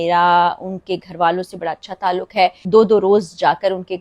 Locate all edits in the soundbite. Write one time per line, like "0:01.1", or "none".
0:02.7